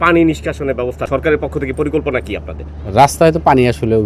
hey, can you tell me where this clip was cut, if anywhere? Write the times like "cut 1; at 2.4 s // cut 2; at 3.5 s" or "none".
cut 1; at 1.1 s

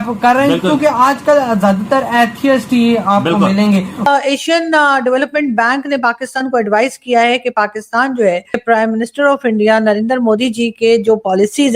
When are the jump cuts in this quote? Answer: cut 1; at 4.1 s // cut 2; at 8.6 s

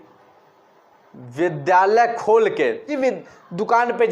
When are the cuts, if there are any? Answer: cut 1; at 2.9 s

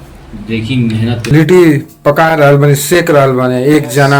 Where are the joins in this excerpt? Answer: cut 1; at 1.3 s

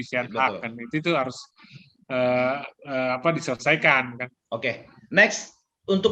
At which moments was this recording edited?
none

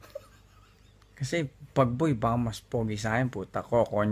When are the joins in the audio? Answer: none

